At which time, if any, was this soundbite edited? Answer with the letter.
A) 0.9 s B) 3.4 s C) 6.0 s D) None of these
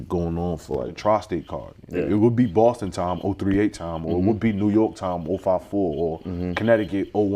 A